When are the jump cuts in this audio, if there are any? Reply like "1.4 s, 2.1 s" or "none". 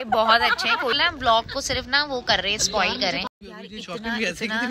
1.0 s, 3.4 s